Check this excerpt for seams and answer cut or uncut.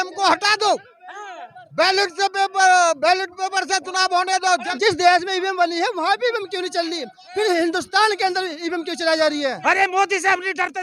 cut